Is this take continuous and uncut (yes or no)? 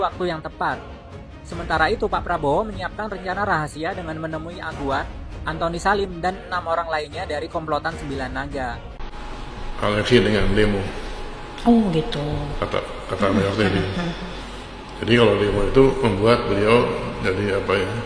no